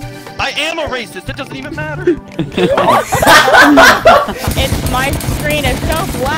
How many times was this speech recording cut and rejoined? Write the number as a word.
one